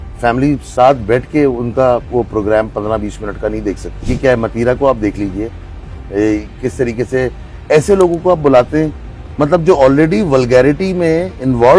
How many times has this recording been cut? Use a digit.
1